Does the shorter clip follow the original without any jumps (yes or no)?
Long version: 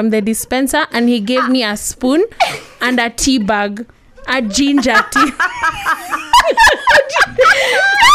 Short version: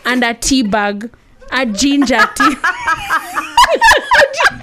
yes